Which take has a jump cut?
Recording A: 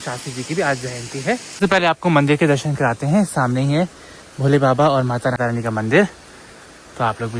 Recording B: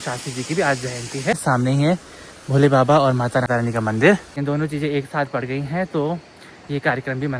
B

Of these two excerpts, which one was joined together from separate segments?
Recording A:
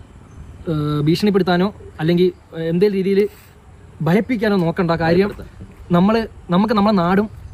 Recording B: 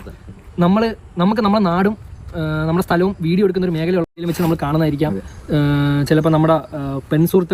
B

